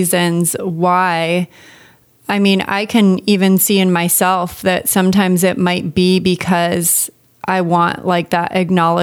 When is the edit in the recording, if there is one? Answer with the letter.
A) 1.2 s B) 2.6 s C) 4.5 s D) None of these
D